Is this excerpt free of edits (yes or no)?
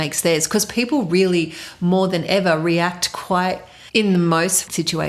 no